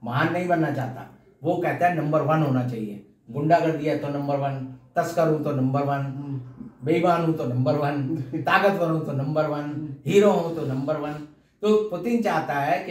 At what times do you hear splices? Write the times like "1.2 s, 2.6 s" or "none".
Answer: none